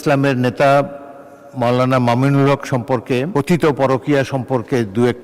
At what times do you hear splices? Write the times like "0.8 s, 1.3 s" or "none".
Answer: 3.3 s